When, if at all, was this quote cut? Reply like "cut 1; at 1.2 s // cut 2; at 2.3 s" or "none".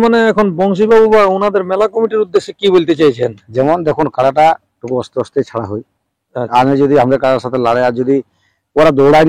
none